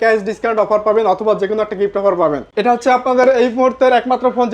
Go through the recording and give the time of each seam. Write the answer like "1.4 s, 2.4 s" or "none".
2.5 s